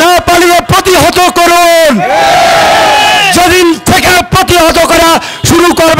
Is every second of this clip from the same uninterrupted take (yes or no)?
yes